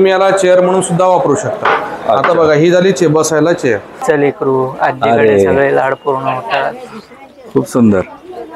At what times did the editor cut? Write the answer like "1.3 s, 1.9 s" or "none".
4.0 s